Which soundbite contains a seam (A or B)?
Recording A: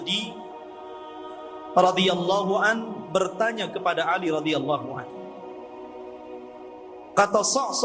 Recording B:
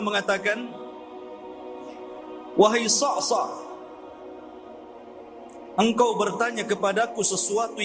B